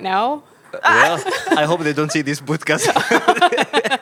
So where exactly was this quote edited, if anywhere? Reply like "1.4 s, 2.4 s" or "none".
none